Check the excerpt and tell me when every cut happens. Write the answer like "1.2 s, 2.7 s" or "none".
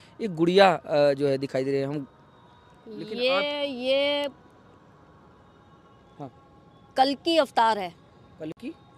none